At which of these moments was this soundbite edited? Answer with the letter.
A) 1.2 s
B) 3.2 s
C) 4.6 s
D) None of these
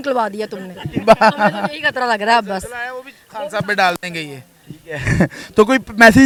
D